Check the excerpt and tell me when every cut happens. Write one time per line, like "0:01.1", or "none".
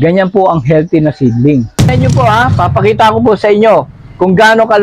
0:01.9